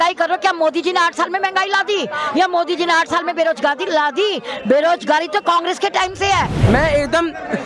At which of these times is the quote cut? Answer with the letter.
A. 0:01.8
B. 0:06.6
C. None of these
B